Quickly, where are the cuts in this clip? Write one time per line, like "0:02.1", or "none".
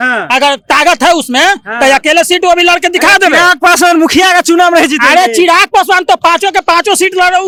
none